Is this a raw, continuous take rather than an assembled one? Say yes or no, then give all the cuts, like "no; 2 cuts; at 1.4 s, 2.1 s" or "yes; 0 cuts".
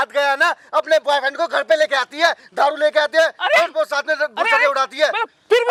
yes; 0 cuts